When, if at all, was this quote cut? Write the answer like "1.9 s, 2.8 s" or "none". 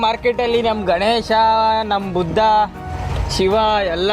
none